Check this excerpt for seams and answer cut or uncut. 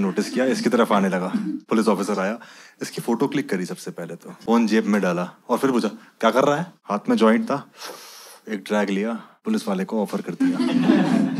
cut